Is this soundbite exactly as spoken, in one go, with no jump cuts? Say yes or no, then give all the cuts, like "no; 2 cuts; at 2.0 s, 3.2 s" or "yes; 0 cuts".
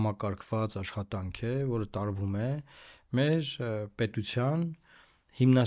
yes; 0 cuts